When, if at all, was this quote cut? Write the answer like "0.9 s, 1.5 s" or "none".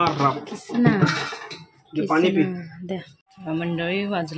3.1 s